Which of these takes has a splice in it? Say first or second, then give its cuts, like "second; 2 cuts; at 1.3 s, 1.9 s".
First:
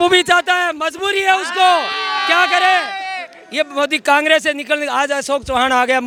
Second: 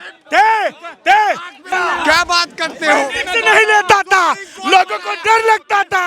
second; 1 cut; at 1.7 s